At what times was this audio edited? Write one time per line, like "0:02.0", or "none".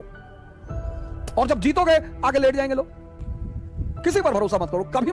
0:03.0